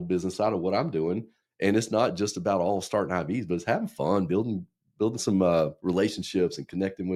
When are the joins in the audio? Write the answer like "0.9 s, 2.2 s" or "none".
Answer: none